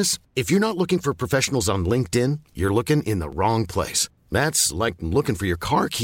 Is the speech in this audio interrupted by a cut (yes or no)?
no